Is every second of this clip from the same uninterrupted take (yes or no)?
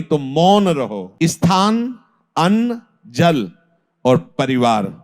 no